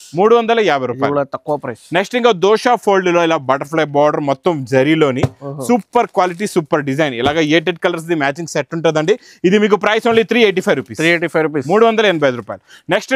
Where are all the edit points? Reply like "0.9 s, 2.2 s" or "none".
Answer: none

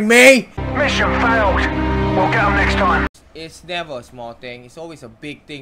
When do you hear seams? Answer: 3.1 s

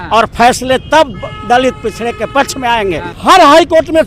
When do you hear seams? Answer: 3.1 s

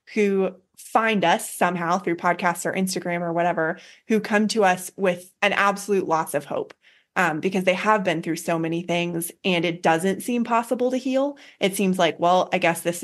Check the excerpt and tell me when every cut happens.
5.3 s

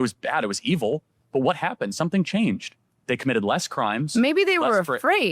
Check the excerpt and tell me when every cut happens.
2.7 s

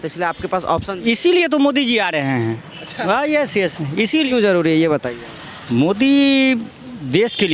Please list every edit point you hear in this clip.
4.3 s

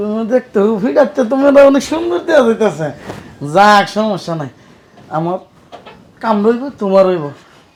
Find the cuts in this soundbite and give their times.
none

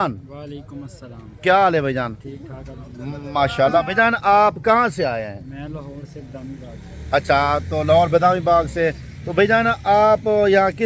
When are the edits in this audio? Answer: none

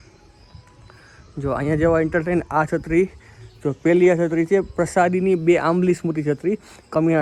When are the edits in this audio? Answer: none

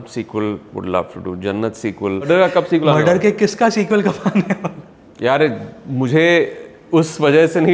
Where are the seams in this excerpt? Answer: 2.3 s

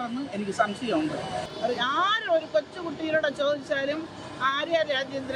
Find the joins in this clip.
1.4 s

